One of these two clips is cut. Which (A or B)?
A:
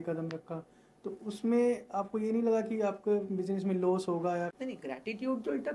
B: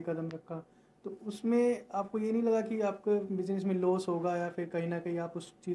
A